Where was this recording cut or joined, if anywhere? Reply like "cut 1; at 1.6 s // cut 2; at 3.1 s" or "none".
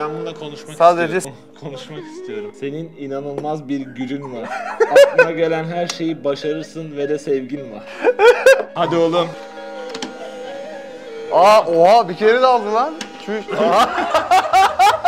none